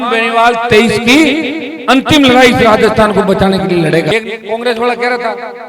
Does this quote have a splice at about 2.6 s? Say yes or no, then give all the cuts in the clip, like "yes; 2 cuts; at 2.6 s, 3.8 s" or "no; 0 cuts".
no; 1 cut; at 4.1 s